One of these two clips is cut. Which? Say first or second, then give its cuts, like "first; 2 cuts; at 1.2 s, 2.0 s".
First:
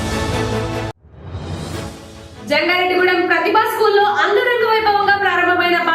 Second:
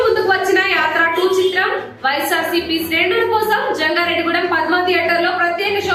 first; 1 cut; at 2.1 s